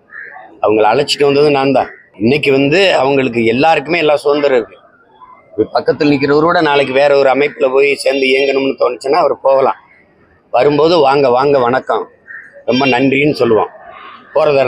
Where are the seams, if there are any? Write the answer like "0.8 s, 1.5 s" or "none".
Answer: 2.0 s